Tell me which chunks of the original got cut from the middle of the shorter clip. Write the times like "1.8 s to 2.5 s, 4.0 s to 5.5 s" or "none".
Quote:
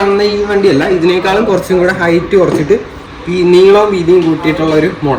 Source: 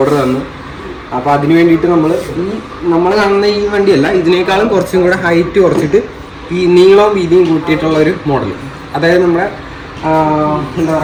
none